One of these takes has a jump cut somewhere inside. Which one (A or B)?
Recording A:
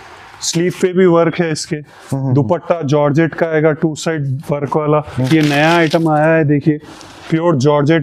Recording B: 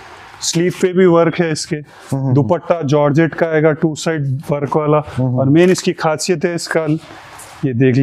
A